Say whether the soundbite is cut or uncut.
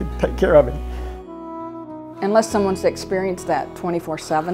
cut